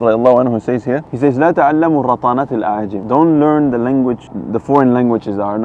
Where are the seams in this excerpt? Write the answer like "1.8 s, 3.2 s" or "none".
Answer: 1.1 s, 2.9 s, 4.3 s